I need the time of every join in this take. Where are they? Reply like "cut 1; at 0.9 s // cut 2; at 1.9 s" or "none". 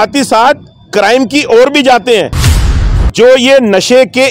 cut 1; at 2.7 s